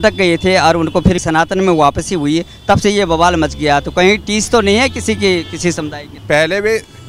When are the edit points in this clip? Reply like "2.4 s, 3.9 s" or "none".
6.2 s